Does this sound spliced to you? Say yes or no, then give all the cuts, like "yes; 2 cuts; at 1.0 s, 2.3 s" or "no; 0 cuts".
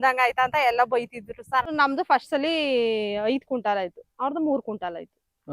yes; 1 cut; at 1.7 s